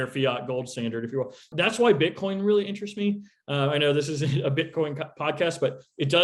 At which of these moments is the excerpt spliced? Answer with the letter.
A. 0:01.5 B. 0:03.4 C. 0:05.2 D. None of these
A